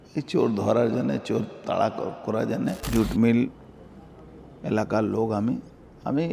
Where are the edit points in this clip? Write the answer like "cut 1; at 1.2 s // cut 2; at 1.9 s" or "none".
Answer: cut 1; at 2.8 s